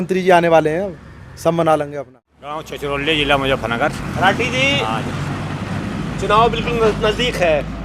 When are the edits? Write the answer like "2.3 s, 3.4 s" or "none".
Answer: 2.6 s